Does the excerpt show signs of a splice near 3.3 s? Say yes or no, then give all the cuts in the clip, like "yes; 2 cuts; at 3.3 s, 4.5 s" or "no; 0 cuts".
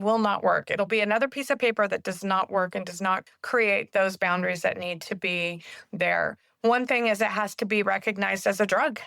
yes; 1 cut; at 3.3 s